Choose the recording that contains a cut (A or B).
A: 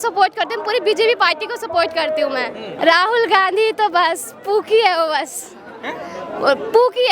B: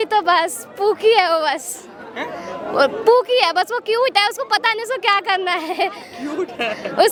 A